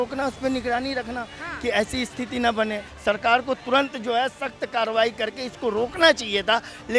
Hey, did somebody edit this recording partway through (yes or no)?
yes